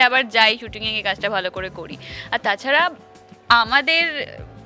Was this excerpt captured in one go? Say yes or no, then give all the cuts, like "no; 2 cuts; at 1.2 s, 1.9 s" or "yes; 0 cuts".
yes; 0 cuts